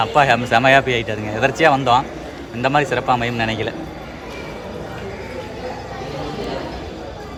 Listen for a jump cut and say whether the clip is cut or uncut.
uncut